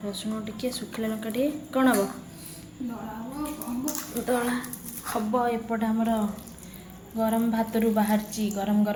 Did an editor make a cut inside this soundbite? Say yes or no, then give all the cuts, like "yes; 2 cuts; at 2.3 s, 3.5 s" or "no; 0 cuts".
no; 0 cuts